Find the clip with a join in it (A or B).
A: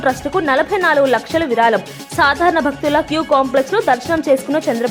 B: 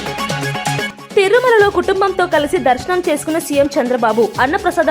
B